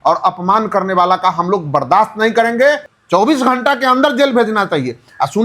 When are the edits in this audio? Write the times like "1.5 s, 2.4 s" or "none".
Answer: 2.9 s